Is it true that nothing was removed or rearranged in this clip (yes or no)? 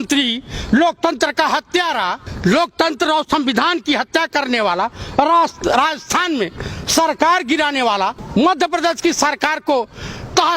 no